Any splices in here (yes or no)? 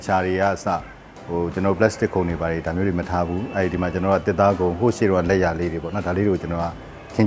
no